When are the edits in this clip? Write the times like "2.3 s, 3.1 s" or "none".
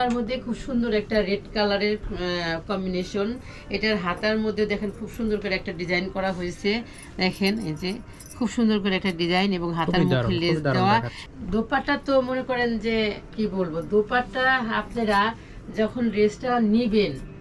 11.2 s